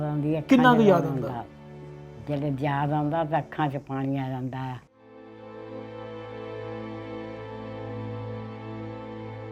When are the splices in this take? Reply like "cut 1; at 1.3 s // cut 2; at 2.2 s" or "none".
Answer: cut 1; at 5.4 s